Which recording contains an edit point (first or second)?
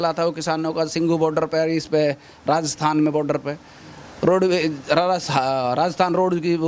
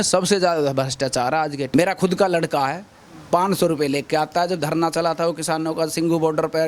second